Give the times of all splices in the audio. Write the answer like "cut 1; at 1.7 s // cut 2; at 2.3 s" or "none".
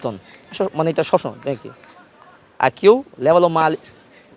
none